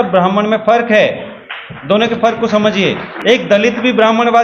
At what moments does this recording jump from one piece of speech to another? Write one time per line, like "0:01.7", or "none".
0:03.1